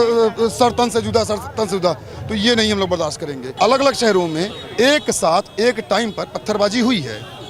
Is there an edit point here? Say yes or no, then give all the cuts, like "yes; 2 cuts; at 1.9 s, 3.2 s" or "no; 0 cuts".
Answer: yes; 1 cut; at 3.5 s